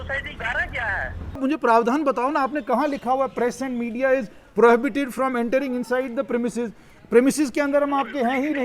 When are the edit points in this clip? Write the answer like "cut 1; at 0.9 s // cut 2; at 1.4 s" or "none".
cut 1; at 1.4 s